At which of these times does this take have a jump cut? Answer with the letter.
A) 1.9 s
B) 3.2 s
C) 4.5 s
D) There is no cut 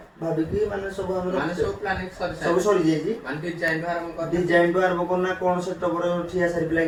D